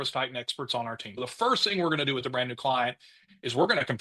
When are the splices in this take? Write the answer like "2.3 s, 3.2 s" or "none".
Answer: 1.1 s